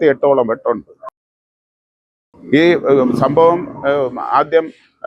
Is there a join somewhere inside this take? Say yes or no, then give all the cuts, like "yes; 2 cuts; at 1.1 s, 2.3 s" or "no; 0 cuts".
no; 0 cuts